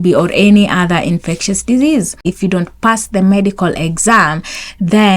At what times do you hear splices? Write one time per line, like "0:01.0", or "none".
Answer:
0:02.2

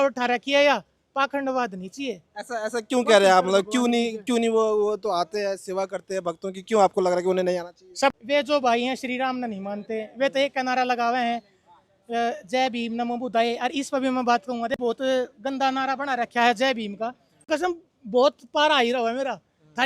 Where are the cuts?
0:08.1
0:14.7
0:17.5

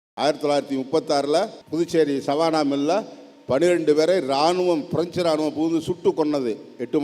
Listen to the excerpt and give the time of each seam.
0:01.6

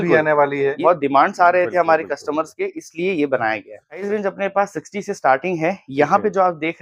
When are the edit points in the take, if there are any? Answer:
0:00.8
0:04.1

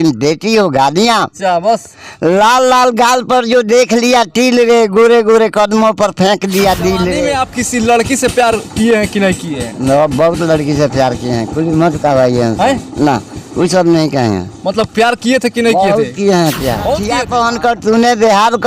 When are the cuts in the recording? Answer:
0:07.3
0:17.2

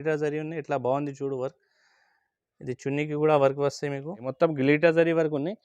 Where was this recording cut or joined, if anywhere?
0:04.2

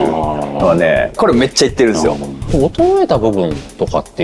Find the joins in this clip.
0:01.1
0:02.5

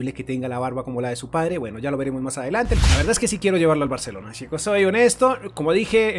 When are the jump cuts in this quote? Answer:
0:02.8

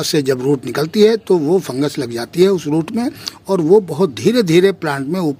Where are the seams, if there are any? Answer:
none

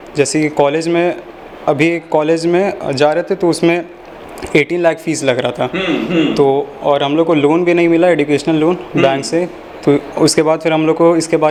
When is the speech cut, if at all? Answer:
none

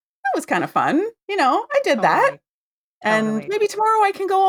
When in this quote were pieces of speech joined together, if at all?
none

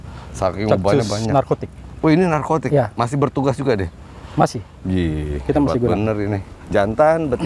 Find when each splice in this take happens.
none

